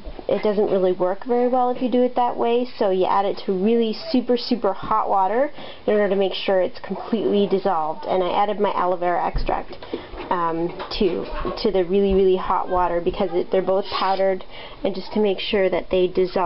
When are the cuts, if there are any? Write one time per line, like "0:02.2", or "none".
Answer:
0:13.0